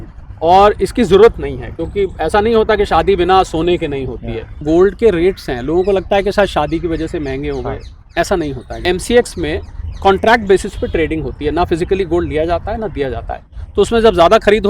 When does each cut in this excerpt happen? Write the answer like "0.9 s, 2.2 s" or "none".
4.6 s, 8.8 s